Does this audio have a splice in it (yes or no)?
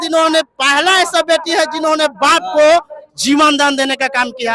no